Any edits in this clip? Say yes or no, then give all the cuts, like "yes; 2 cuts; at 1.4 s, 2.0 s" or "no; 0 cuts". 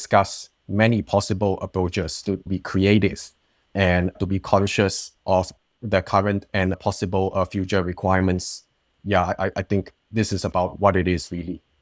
no; 0 cuts